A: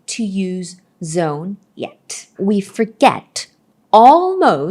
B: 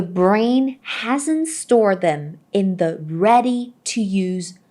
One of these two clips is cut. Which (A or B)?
A